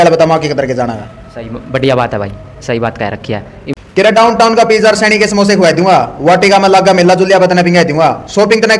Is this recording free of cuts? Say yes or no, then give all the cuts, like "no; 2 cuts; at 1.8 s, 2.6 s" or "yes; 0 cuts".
no; 1 cut; at 3.6 s